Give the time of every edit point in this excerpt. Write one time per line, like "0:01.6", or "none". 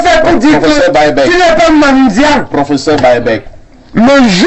0:03.5